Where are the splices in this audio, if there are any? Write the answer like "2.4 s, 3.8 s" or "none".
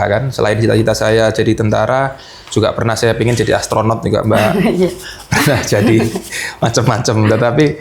none